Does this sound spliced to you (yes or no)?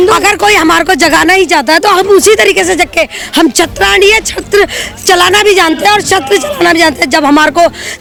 no